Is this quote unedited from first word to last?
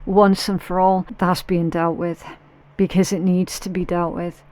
no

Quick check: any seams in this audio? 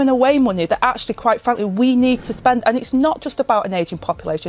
no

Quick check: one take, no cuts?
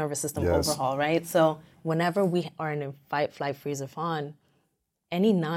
no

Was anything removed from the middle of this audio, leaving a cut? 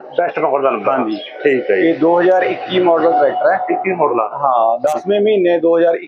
no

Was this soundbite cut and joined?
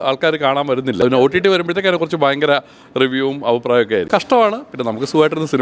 yes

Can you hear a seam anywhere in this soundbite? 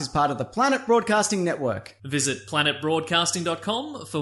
no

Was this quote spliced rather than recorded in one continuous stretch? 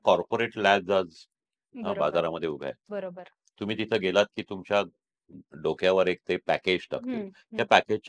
no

